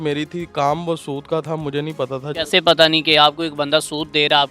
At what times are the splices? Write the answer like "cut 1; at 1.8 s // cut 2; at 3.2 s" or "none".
cut 1; at 2.3 s